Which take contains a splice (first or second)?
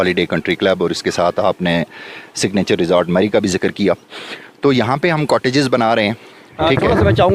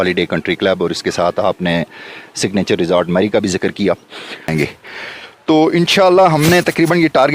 second